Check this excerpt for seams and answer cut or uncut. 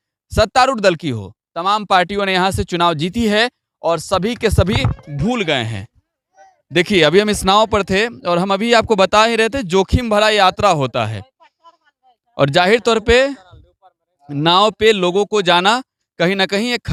uncut